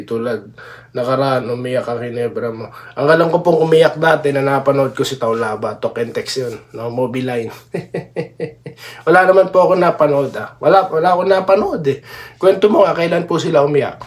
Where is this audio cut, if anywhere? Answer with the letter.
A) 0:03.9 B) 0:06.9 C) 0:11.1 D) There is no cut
D